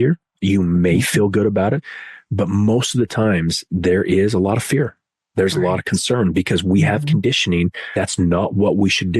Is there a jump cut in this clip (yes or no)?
yes